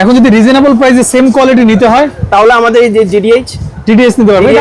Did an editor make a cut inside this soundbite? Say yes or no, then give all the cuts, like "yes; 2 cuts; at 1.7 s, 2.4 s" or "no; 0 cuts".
no; 0 cuts